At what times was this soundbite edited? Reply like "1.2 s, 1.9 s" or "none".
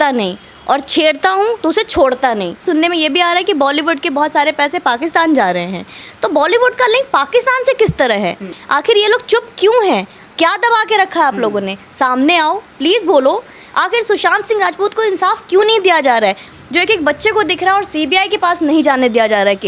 2.6 s, 8.5 s, 16.5 s